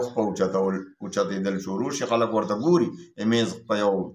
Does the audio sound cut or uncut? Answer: uncut